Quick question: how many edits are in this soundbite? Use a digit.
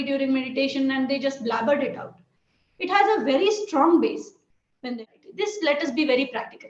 1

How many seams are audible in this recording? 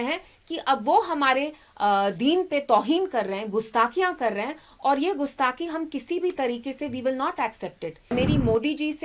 1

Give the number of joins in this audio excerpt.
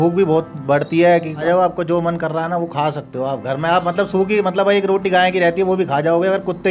1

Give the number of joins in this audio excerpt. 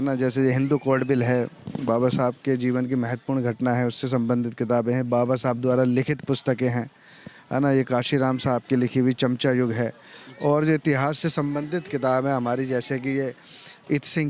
0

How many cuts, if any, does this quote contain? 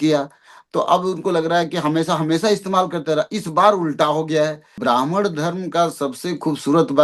1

